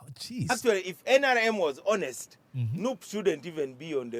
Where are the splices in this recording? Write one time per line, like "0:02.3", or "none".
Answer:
none